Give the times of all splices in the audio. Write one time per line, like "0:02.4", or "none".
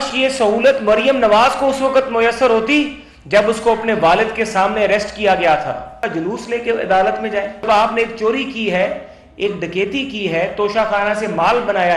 0:06.1
0:07.6